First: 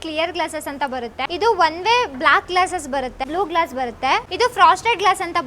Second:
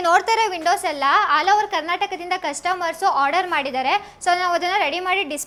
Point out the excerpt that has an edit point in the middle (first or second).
first